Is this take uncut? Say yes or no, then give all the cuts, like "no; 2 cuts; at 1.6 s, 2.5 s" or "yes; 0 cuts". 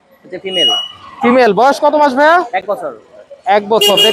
yes; 0 cuts